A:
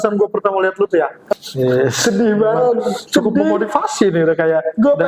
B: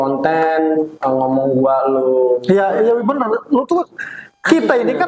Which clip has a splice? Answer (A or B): A